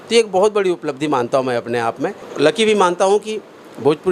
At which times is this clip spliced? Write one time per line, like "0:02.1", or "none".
none